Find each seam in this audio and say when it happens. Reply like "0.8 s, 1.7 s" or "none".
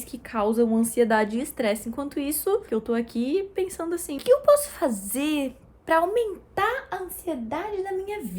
2.7 s, 4.1 s